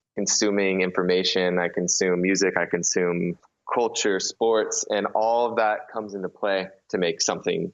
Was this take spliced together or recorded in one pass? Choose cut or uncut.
cut